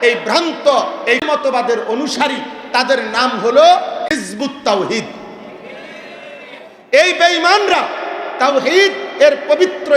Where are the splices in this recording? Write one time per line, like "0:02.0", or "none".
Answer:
0:01.2